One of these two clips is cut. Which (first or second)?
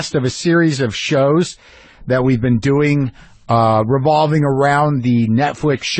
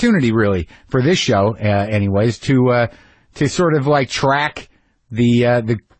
first